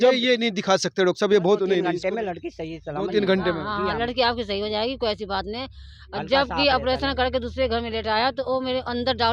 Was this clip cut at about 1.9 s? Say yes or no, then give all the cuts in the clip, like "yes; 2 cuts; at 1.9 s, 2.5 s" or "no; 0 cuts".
yes; 1 cut; at 1.9 s